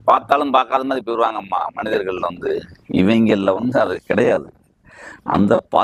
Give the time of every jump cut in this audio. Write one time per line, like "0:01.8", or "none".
none